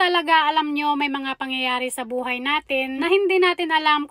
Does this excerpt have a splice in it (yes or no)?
yes